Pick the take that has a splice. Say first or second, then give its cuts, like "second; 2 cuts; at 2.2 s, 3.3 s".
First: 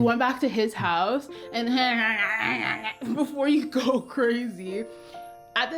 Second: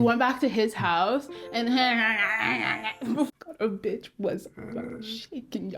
second; 1 cut; at 3.3 s